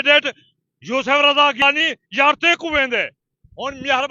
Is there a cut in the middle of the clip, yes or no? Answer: yes